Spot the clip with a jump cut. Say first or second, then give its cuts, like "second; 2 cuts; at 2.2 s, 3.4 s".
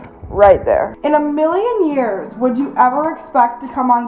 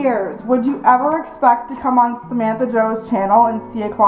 first; 1 cut; at 1.0 s